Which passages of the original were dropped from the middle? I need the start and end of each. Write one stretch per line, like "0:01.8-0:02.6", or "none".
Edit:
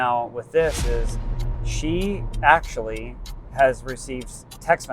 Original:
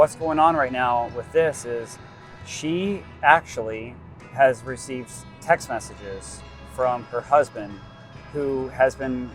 none